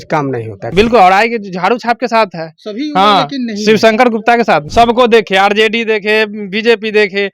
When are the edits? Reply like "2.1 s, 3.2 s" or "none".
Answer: 0.7 s, 4.7 s